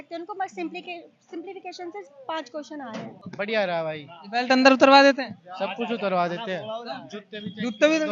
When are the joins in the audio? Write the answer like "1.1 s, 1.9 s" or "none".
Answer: 3.2 s